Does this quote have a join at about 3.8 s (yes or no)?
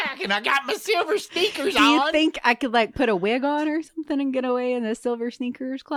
no